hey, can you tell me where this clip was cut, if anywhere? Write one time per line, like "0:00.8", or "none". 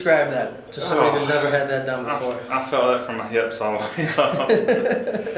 none